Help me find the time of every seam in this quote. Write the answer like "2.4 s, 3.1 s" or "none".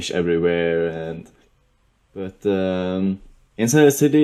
none